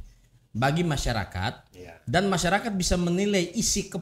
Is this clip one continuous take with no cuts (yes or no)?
yes